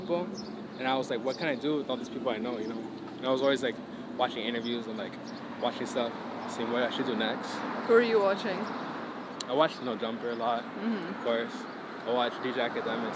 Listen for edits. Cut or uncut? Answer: uncut